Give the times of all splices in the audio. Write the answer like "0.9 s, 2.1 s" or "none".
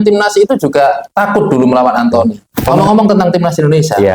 2.7 s